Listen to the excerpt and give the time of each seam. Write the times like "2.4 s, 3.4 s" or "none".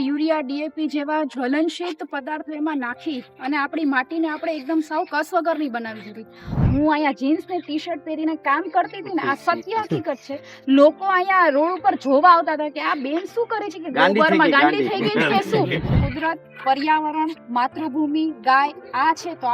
6.6 s, 15.9 s